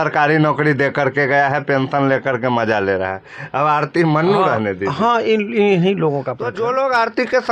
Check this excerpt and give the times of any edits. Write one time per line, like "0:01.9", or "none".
0:06.5